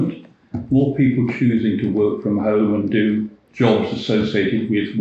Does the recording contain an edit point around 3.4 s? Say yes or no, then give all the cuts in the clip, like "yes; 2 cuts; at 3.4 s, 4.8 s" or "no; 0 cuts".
yes; 1 cut; at 3.4 s